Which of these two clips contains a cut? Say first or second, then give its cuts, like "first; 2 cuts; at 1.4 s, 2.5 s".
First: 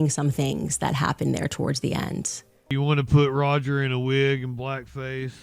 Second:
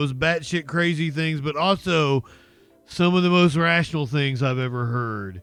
first; 1 cut; at 2.7 s